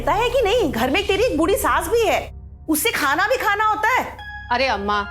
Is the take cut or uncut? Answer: uncut